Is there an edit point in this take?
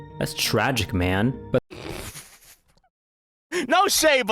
yes; 1 cut; at 1.2 s

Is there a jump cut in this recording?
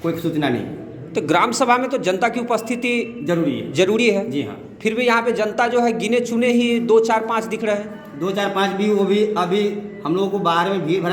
no; 0 cuts

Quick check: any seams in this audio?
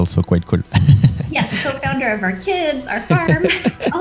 no; 0 cuts

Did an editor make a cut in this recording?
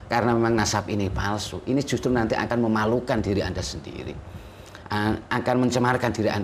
no; 0 cuts

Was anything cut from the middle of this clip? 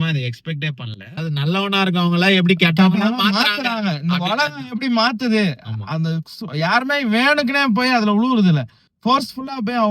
yes; 1 cut; at 1.2 s

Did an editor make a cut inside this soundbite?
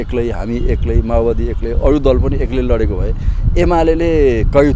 no; 0 cuts

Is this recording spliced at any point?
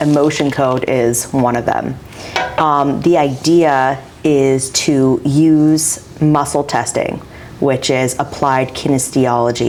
no; 0 cuts

